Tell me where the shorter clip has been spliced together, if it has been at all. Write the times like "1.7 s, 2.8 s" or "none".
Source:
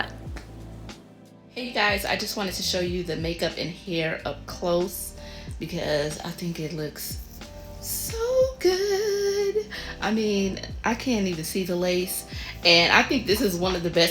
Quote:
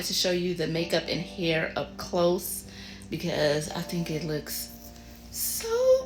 none